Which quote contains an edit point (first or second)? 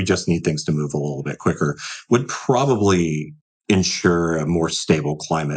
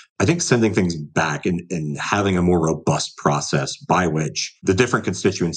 second